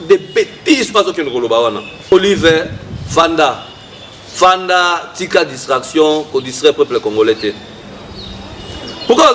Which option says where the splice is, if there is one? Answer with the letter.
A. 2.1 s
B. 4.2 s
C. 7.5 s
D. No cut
A